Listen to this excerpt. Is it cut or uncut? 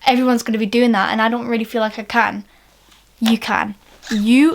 uncut